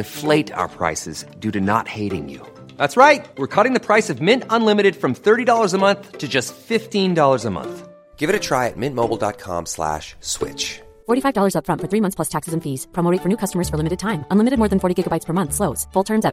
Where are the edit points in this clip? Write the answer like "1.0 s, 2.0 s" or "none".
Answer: none

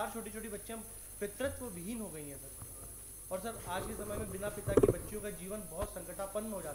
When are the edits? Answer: none

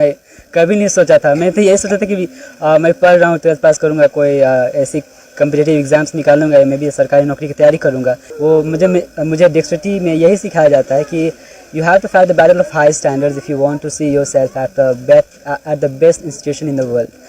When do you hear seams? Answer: 8.3 s

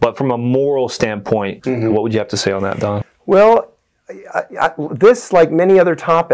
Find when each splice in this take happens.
1.5 s

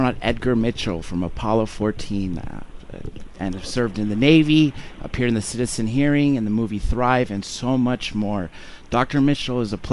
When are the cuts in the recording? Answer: none

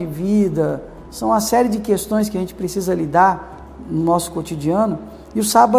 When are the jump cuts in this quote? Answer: 1.0 s

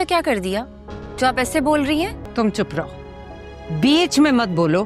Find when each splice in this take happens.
2.2 s

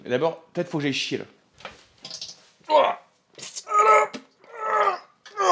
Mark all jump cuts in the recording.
none

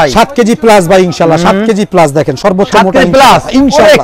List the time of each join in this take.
none

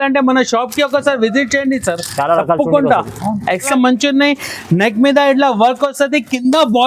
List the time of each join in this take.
3.7 s

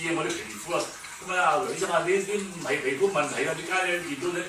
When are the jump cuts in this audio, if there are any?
3.3 s

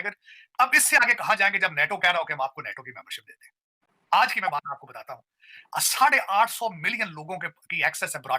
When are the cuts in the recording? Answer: none

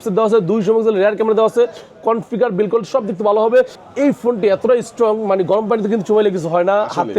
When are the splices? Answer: 3.8 s

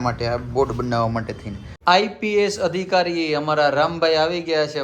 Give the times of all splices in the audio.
1.7 s

